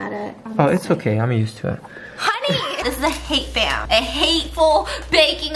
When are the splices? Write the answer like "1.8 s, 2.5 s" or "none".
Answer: 2.8 s

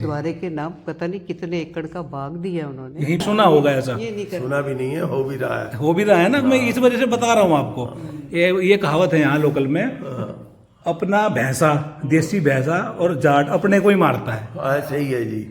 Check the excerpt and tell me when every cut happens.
3.2 s

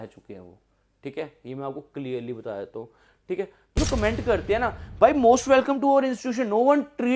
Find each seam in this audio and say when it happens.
3.8 s

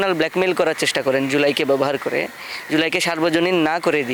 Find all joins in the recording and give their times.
none

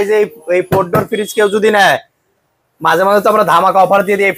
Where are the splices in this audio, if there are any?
none

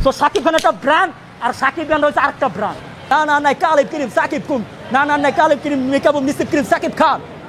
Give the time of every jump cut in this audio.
2.9 s

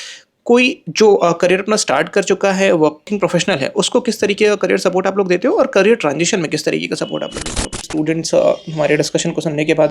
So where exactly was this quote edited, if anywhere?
3.1 s, 7.9 s

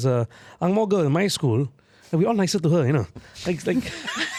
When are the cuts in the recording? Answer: none

